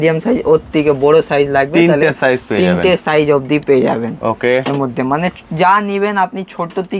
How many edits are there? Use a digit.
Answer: 0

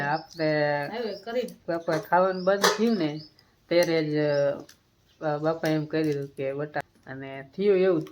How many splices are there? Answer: 1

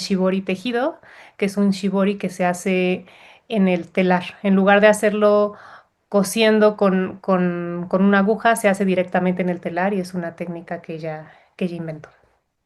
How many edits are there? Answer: 0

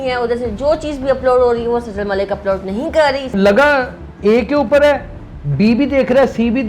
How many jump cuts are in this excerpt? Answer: 1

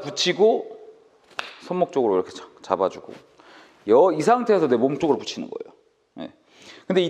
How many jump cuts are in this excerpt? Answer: 0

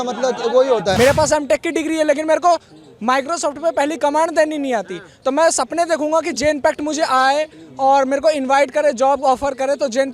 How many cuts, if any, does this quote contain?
1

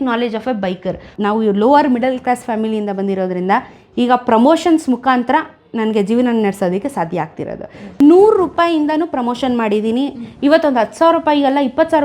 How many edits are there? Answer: 2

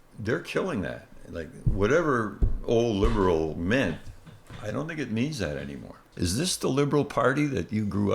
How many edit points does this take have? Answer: 1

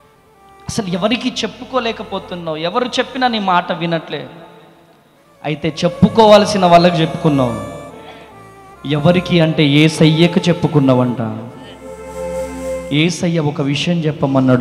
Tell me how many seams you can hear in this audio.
0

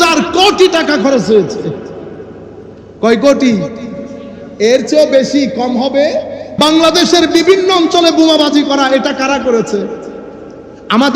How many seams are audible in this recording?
1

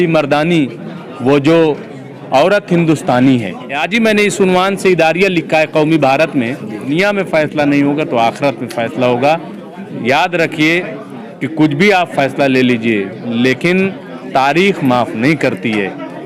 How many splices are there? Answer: 2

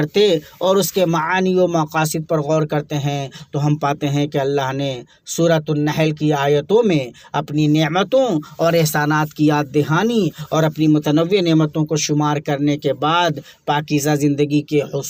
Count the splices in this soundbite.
0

